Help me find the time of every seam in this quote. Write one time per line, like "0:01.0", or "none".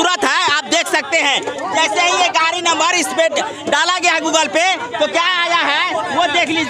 none